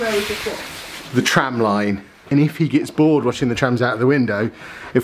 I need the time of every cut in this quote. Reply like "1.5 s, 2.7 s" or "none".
2.3 s